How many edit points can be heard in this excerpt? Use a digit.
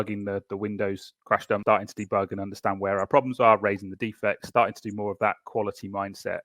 1